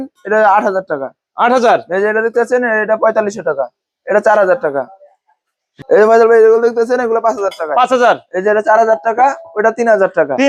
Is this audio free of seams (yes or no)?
yes